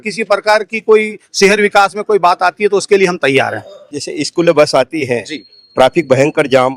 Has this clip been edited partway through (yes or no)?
yes